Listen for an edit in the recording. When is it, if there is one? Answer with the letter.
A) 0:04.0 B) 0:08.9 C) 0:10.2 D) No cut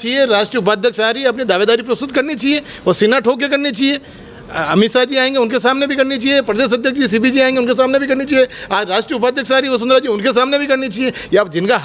D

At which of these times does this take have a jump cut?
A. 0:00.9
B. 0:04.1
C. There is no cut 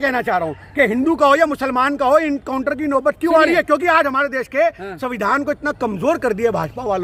C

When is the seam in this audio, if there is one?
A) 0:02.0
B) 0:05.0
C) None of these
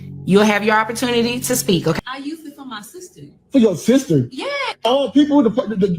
A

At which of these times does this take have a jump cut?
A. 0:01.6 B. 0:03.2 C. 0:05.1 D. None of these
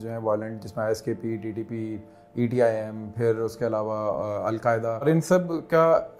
C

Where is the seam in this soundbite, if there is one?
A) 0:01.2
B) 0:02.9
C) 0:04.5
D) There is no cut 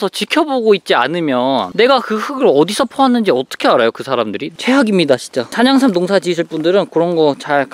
C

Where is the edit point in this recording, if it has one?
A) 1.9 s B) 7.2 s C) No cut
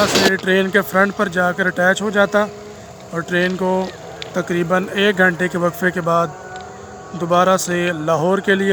C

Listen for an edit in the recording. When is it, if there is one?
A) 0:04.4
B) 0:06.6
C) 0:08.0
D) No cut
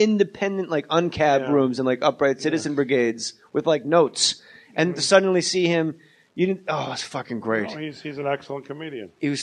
A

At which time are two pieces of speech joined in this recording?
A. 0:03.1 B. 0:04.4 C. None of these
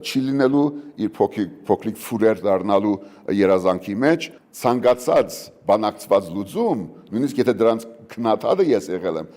B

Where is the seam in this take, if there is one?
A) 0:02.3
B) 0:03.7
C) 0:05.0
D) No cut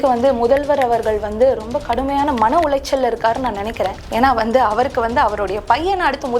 D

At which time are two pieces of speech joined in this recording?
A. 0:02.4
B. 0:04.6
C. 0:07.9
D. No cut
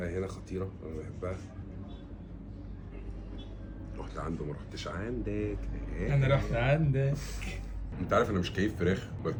D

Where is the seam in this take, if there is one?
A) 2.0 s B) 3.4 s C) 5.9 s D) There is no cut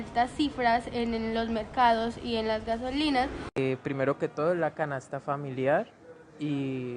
B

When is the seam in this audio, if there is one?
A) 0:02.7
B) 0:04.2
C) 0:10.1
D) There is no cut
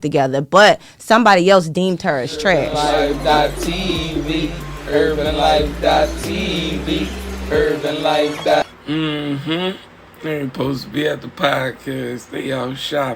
A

